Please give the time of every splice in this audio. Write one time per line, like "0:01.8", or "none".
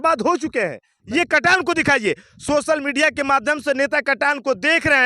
0:01.0